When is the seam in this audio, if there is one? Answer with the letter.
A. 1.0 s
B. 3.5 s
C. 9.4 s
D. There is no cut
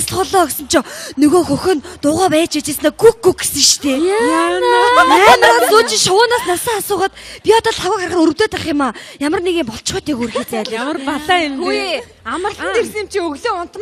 C